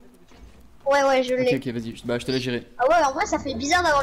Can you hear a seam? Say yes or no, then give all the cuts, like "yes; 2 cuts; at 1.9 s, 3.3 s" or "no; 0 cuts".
no; 0 cuts